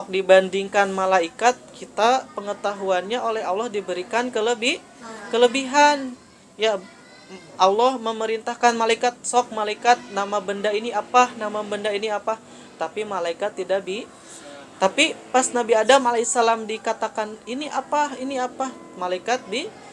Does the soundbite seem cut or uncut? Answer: uncut